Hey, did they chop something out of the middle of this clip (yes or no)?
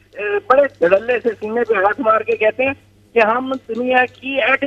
no